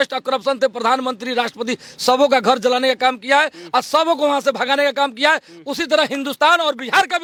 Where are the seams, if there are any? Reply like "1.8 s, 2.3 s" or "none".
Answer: none